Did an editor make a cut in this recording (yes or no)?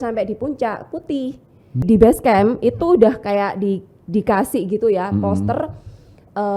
yes